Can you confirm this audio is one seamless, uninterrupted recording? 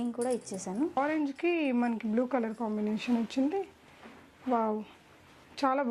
no; 1 cut; at 1.0 s

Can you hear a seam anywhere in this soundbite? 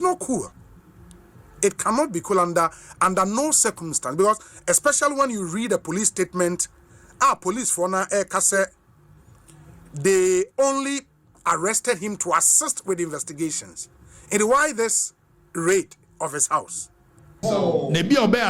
yes; 1 cut; at 17.3 s

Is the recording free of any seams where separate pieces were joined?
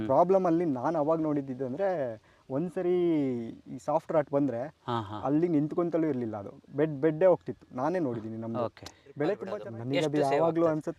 no; 1 cut; at 9.1 s

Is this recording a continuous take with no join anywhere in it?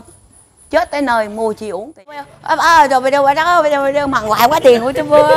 no; 1 cut; at 2.3 s

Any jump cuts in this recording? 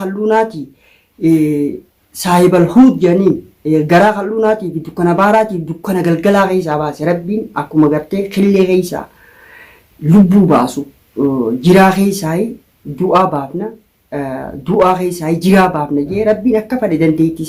no; 0 cuts

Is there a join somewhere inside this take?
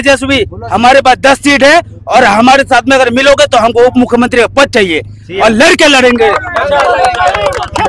no; 0 cuts

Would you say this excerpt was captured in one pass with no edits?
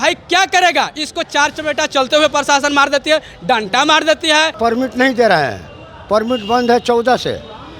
no; 1 cut; at 4.5 s

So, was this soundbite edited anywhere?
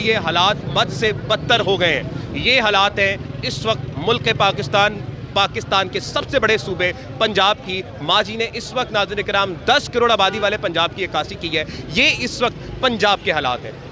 no; 0 cuts

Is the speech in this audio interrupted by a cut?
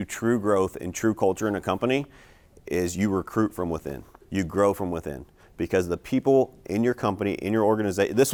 no; 0 cuts

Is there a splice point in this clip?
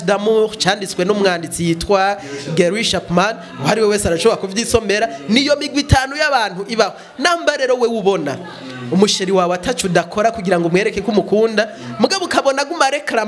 no; 0 cuts

